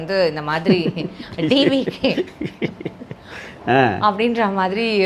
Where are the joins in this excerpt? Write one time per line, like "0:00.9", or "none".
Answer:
none